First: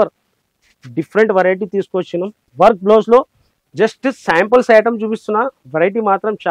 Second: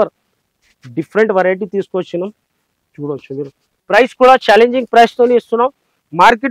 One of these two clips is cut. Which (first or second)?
first